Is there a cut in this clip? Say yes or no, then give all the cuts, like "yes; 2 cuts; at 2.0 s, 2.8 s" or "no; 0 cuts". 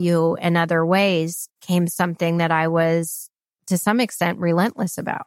no; 0 cuts